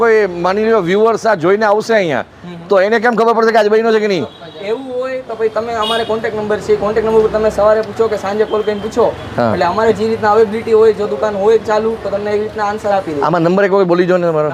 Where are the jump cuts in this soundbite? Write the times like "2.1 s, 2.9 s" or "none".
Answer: none